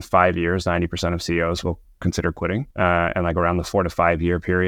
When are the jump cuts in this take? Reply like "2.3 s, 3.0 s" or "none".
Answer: 2.7 s